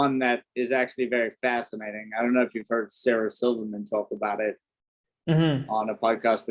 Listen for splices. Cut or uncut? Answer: uncut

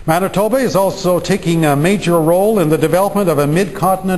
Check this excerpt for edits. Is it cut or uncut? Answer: uncut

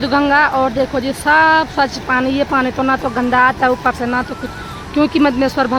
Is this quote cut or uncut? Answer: uncut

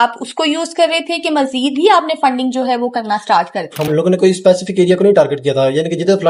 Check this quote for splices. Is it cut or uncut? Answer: cut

